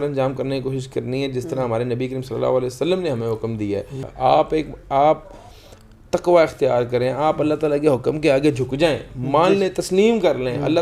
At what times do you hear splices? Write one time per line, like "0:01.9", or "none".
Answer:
0:04.0